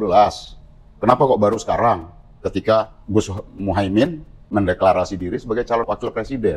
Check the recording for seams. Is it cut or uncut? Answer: cut